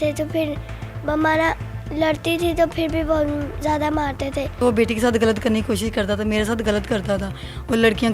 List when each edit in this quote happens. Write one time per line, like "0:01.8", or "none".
0:04.6